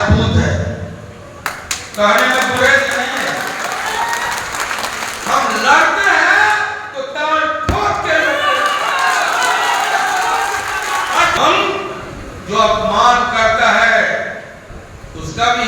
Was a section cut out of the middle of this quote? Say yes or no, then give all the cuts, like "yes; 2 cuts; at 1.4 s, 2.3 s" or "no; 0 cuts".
yes; 1 cut; at 11.4 s